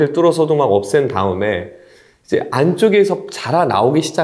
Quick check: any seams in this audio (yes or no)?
no